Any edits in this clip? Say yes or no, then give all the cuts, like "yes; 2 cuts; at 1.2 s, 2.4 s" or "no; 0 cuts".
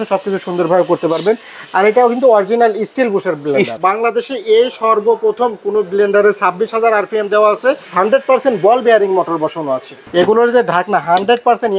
yes; 3 cuts; at 3.8 s, 7.9 s, 9.9 s